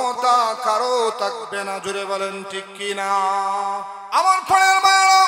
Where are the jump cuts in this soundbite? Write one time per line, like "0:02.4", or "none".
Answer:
0:04.0